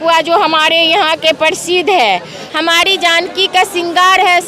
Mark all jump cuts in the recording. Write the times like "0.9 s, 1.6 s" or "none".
2.4 s